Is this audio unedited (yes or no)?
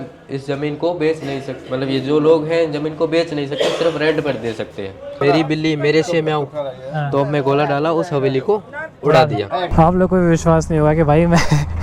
no